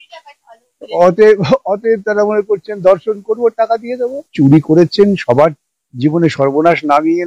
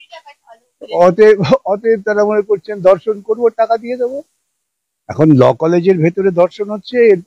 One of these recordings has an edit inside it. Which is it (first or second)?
first